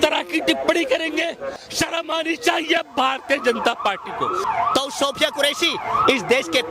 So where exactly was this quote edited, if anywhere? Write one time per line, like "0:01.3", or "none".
0:01.5
0:04.4